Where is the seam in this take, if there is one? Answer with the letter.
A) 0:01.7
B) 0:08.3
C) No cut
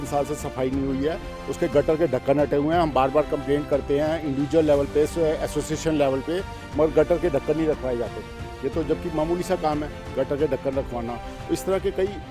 C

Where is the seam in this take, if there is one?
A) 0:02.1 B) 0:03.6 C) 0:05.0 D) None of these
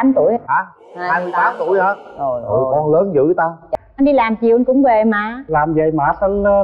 B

